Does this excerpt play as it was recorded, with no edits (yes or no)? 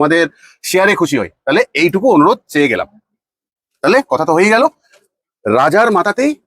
yes